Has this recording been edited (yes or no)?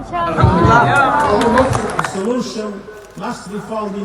yes